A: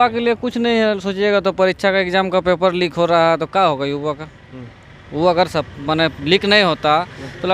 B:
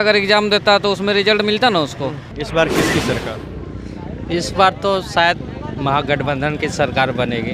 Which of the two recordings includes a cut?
B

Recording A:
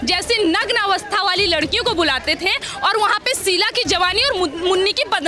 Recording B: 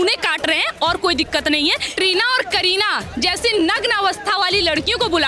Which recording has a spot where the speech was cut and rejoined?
B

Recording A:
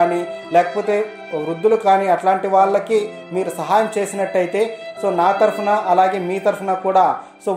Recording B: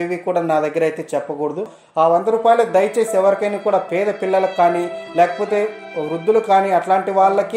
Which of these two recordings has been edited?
B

